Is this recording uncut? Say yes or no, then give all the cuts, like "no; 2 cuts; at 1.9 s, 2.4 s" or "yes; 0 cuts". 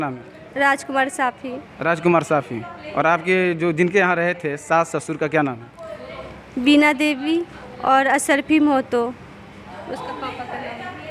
yes; 0 cuts